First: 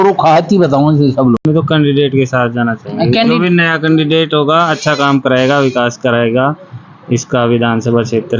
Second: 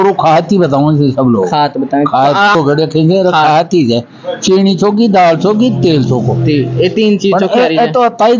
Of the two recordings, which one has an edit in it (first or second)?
first